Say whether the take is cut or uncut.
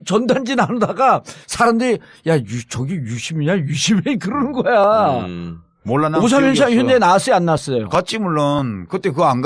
cut